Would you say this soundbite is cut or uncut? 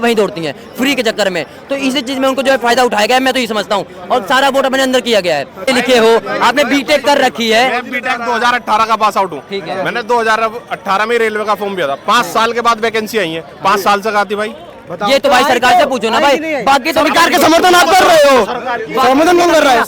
cut